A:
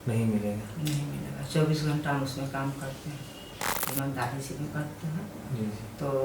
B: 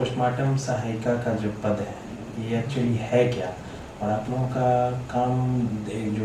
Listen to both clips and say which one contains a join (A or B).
A